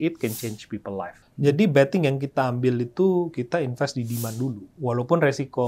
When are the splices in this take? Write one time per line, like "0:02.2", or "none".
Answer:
0:01.2
0:04.7